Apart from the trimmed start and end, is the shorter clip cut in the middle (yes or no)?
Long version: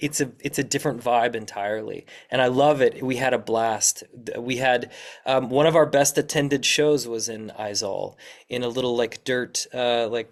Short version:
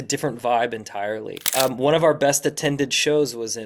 yes